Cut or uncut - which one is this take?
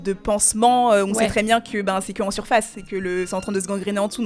uncut